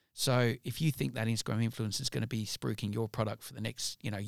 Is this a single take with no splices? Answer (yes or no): yes